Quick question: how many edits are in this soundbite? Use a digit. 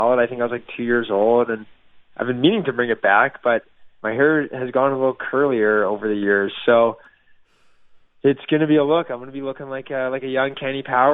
0